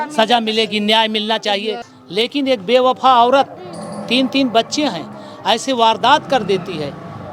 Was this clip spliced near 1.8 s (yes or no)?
yes